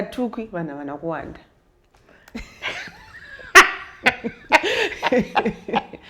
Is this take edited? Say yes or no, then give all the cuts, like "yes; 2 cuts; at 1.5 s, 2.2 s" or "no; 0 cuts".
no; 0 cuts